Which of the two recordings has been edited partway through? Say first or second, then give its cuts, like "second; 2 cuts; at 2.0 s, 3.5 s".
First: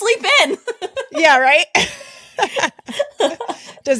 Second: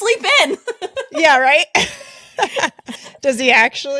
second; 1 cut; at 2.9 s